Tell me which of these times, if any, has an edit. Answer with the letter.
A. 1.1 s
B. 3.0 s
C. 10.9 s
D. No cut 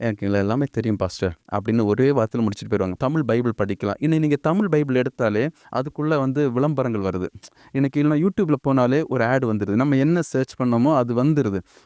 B